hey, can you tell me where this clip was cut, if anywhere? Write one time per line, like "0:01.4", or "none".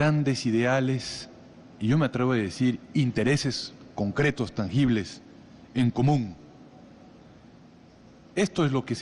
0:01.2